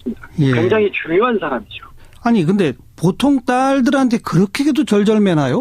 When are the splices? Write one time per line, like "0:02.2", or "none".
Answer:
0:03.3